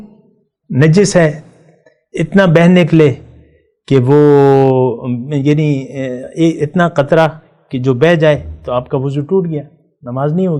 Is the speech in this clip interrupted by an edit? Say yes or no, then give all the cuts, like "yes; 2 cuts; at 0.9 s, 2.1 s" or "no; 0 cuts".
no; 0 cuts